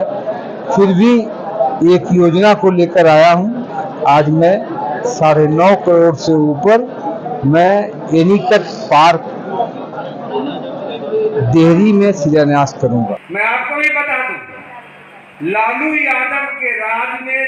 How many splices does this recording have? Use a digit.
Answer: 1